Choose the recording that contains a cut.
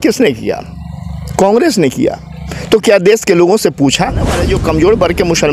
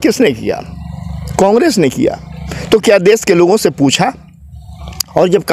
first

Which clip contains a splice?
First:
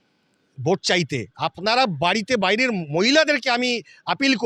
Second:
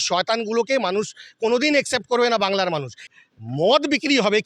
second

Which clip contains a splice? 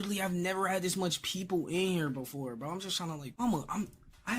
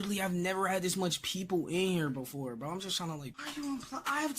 second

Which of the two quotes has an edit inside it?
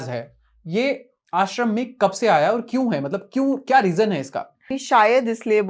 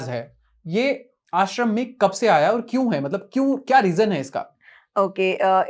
first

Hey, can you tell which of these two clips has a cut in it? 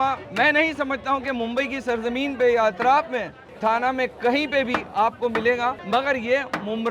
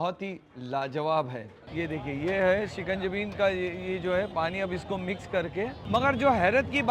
second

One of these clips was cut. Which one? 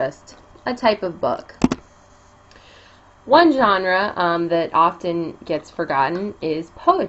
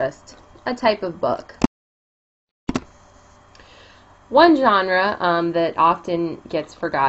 first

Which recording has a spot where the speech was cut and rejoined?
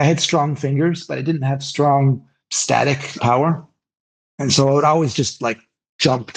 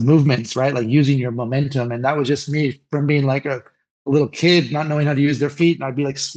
first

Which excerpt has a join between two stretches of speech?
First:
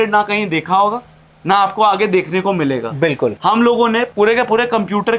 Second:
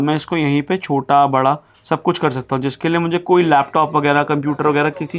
first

